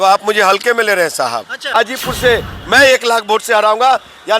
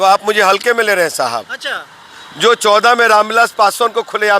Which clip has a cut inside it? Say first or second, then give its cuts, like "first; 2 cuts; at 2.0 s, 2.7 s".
first; 1 cut; at 1.7 s